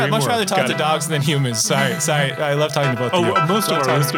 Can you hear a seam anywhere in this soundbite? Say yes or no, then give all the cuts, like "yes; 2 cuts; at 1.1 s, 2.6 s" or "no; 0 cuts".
no; 0 cuts